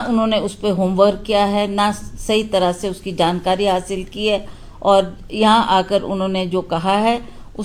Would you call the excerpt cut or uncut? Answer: uncut